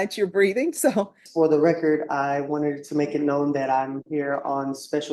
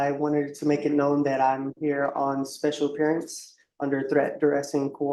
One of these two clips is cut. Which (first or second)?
first